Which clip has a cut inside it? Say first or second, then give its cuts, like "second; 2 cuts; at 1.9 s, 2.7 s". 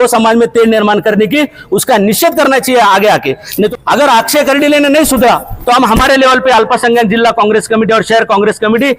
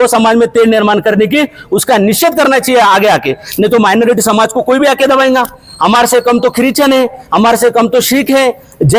first; 1 cut; at 3.7 s